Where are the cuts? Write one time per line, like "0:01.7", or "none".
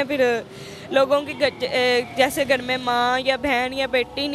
none